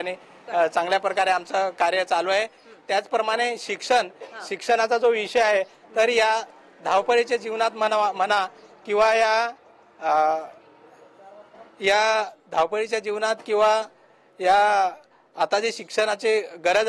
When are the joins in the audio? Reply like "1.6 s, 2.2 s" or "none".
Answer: none